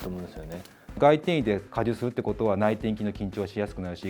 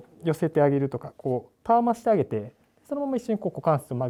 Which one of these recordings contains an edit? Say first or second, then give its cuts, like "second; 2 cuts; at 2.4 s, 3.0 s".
first; 2 cuts; at 1.0 s, 1.7 s